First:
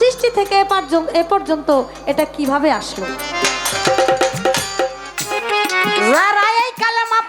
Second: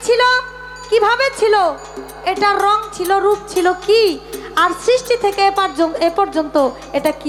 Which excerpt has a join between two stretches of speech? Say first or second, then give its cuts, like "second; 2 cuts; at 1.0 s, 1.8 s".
first; 1 cut; at 5.1 s